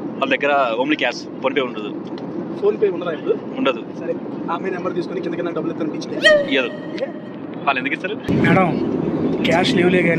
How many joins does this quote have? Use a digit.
1